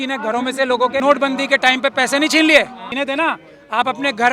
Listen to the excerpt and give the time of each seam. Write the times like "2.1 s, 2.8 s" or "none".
1.0 s, 2.8 s